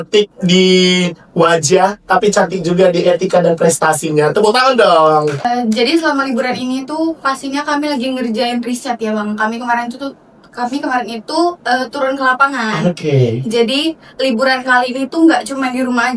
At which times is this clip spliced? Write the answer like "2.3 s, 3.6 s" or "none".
5.4 s